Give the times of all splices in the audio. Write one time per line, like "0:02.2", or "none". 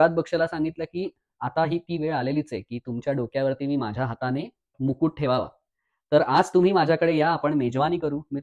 none